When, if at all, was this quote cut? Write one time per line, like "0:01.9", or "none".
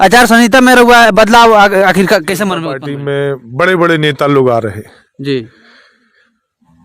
0:02.8